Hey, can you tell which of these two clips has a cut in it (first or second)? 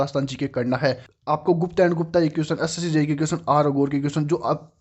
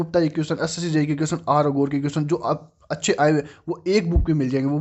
first